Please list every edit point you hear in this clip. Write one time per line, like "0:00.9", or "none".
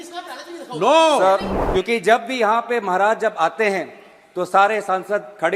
0:01.5